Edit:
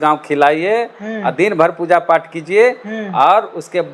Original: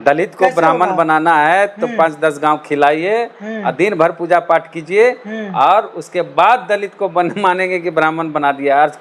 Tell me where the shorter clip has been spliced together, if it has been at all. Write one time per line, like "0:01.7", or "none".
none